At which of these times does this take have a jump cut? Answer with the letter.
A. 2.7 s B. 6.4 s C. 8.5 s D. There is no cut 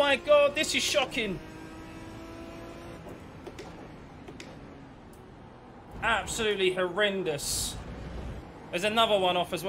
C